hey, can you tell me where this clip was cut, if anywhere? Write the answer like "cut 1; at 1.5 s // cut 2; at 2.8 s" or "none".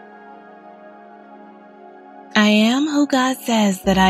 cut 1; at 2.3 s

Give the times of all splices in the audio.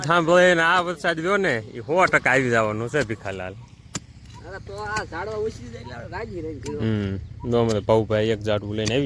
none

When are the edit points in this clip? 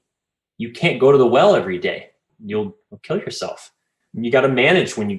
cut 1; at 2.5 s

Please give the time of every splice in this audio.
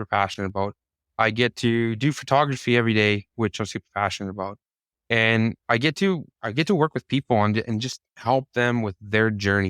cut 1; at 8.2 s

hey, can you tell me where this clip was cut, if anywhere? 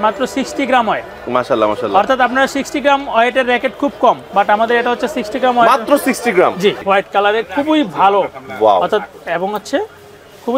cut 1; at 6.8 s

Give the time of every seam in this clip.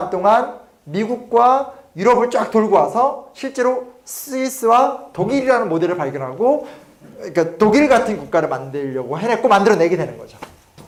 none

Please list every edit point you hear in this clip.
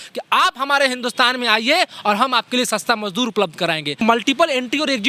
cut 1; at 4.0 s

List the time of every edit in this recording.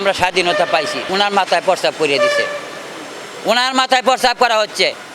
cut 1; at 1.0 s

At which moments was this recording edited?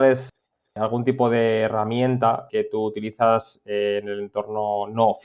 cut 1; at 2.4 s

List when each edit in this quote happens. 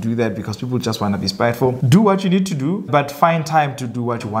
cut 1; at 1.8 s // cut 2; at 2.8 s

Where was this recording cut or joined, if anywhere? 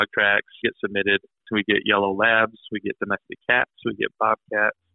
cut 1; at 1.4 s

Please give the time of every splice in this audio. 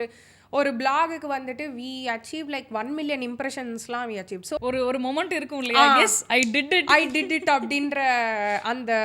cut 1; at 4.6 s

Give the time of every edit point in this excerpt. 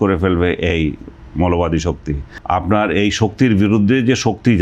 cut 1; at 2.3 s

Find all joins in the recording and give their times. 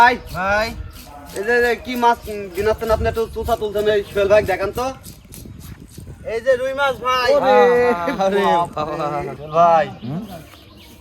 cut 1; at 9.3 s

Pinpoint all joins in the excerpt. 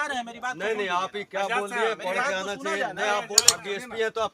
cut 1; at 3.4 s

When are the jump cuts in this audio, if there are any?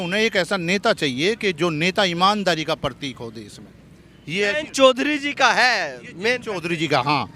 none

